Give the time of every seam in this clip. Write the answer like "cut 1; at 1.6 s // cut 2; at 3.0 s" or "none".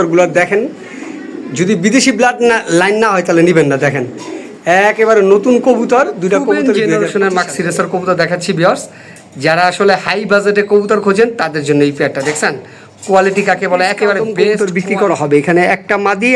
cut 1; at 6.8 s // cut 2; at 14.6 s